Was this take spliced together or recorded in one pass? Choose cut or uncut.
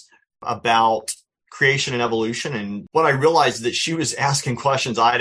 cut